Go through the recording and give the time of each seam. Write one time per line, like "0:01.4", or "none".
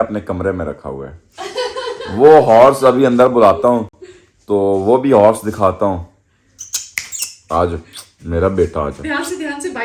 none